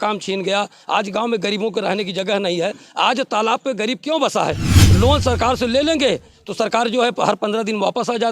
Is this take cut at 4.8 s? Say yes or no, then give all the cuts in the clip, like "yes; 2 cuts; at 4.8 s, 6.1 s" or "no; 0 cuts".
yes; 1 cut; at 4.8 s